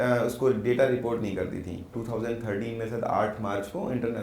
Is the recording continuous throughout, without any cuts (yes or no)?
no